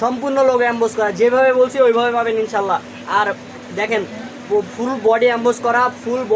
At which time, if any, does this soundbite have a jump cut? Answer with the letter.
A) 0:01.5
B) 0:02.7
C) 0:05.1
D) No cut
D